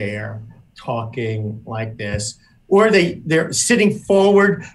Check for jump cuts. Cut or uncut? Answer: uncut